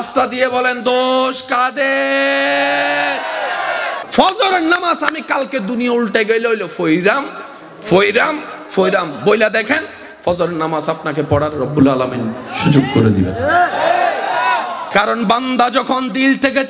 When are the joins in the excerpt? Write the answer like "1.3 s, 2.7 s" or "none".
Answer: 4.0 s